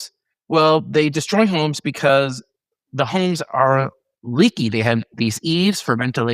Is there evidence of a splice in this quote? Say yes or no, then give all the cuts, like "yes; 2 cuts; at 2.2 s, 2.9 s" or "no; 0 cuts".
no; 0 cuts